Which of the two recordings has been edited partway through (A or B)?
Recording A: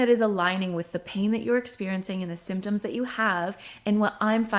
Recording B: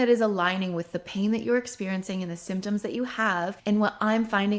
B